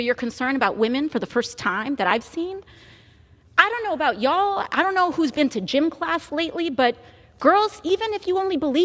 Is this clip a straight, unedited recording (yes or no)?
yes